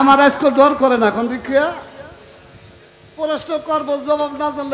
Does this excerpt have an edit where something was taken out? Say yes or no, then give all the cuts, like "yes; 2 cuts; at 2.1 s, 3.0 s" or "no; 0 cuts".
no; 0 cuts